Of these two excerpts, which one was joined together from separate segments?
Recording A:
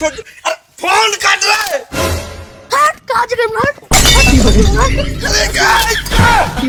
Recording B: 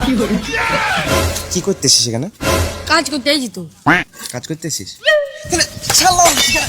B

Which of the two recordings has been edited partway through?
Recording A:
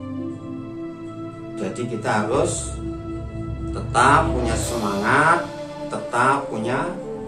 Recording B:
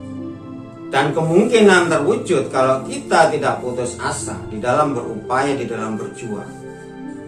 B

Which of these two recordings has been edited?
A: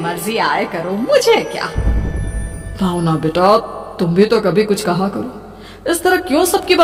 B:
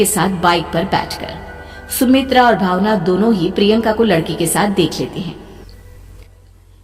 B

